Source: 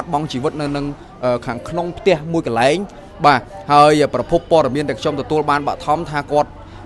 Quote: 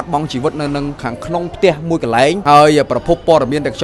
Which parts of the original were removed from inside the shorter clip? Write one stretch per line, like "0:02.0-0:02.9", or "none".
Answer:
0:01.0-0:01.5
0:02.8-0:03.6